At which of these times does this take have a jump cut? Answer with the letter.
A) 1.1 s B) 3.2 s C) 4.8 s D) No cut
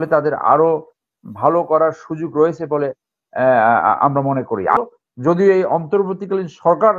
C